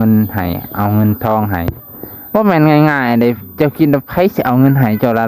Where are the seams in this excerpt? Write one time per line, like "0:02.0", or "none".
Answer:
none

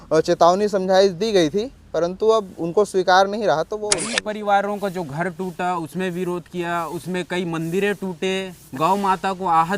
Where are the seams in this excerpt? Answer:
0:04.1
0:08.6

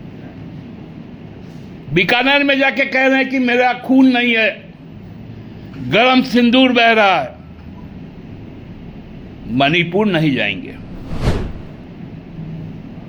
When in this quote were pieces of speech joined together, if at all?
none

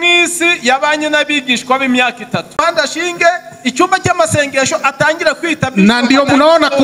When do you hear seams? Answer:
0:02.6

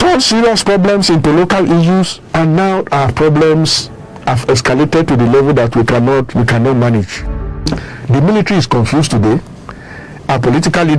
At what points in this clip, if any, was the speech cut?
0:02.2
0:06.3
0:07.8

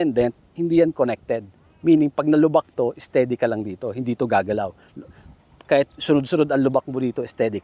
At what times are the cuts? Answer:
none

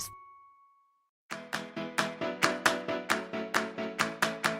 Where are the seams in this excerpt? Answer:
none

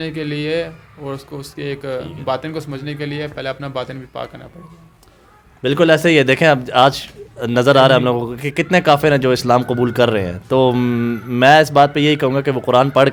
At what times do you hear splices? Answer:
none

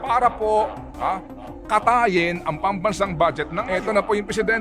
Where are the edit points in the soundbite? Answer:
0:03.5

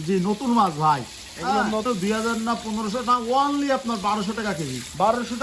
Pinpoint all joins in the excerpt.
0:01.9

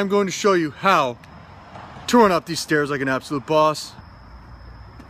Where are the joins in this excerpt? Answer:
0:02.3

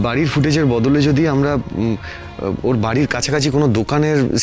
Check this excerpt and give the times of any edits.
none

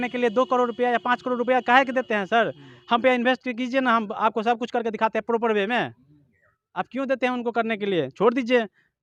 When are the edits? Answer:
none

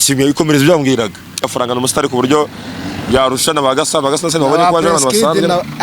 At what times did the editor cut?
0:01.4

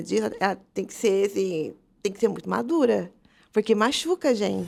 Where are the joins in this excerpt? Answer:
none

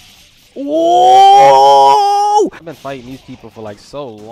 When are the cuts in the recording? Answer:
0:02.6

